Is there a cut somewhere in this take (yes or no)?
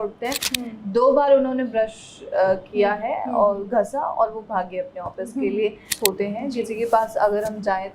yes